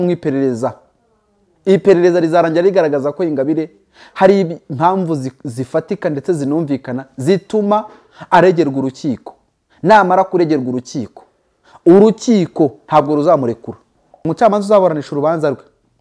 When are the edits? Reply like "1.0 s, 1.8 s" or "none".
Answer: 14.2 s